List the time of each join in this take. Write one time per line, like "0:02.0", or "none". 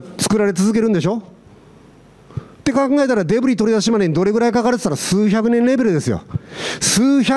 none